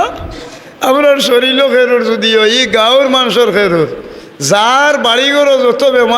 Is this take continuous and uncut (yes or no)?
yes